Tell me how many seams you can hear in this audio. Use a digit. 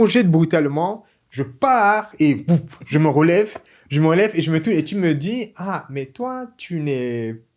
0